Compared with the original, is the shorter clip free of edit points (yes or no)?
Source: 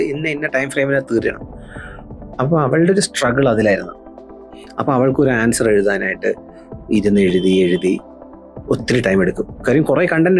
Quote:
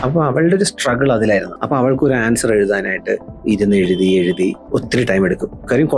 no